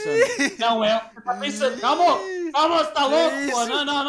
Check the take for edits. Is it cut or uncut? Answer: uncut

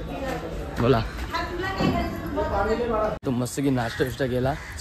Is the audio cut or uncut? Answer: cut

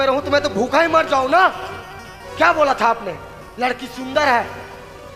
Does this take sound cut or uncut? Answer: uncut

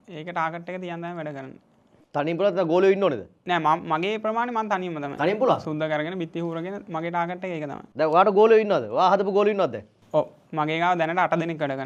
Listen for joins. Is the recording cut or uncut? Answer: uncut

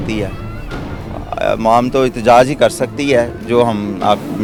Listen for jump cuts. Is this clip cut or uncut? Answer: uncut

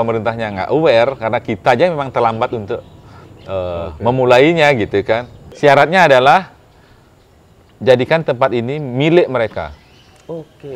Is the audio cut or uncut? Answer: cut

